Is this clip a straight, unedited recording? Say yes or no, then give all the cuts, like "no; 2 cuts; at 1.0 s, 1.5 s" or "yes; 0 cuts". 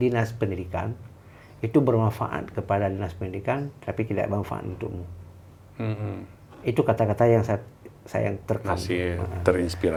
yes; 0 cuts